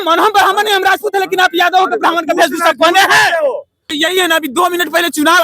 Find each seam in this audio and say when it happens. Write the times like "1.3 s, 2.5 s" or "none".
3.9 s